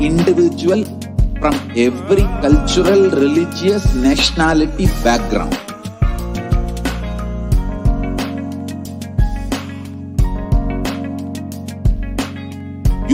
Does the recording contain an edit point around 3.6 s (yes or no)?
no